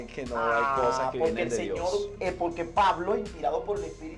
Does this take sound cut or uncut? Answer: cut